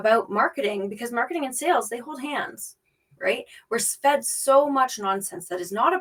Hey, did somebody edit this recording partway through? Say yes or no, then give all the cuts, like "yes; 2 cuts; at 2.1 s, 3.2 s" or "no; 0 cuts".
no; 0 cuts